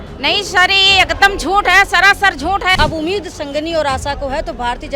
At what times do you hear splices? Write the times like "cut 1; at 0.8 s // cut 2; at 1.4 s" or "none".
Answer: cut 1; at 2.7 s